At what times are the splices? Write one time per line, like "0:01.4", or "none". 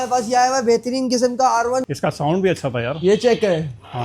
0:01.9